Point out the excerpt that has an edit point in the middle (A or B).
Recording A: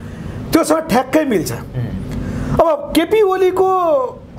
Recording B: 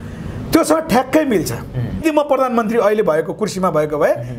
B